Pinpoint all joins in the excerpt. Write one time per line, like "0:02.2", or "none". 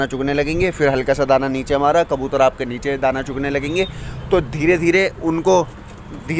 none